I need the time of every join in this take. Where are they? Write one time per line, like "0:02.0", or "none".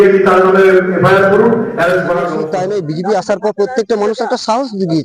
0:02.3